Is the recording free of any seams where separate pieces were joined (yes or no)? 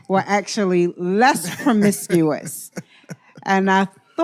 yes